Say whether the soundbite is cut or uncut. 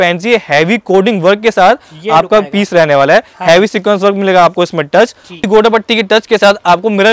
cut